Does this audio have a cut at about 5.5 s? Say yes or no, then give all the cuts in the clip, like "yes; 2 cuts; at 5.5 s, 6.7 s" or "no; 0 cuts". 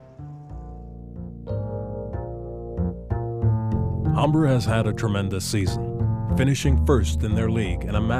no; 1 cut; at 1.8 s